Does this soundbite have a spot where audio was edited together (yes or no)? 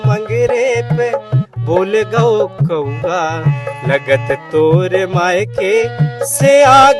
no